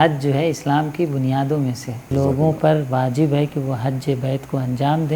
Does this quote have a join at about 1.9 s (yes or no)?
yes